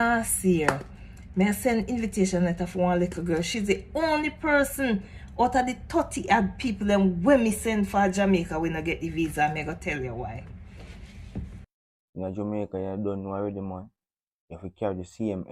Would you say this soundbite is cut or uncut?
cut